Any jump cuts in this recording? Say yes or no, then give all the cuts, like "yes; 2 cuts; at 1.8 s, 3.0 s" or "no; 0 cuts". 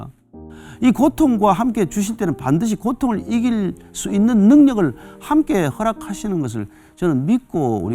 no; 0 cuts